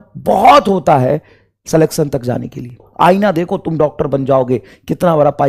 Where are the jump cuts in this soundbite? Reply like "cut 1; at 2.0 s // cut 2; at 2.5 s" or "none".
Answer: cut 1; at 2.9 s